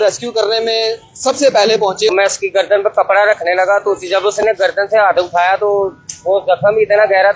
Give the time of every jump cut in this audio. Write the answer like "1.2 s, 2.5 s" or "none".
2.1 s

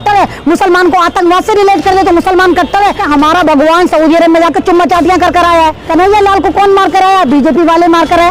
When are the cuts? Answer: 3.0 s, 5.8 s

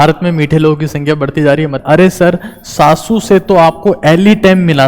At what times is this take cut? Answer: 1.8 s

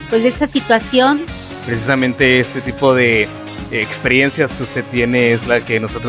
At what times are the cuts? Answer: 1.4 s

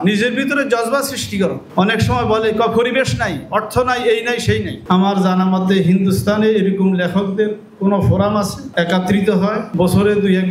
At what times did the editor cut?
4.7 s

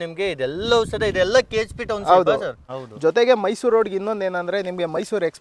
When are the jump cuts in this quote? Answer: 2.6 s

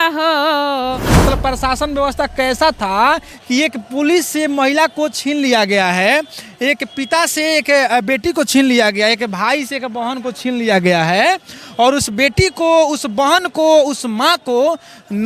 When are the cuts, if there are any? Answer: 1.2 s

